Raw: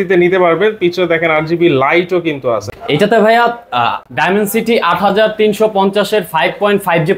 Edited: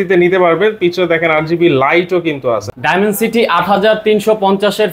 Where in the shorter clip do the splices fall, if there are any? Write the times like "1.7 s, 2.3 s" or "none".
2.7 s